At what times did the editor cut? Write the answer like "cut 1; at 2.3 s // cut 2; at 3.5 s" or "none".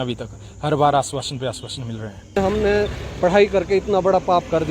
cut 1; at 2.4 s